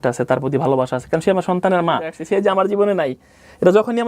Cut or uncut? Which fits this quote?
cut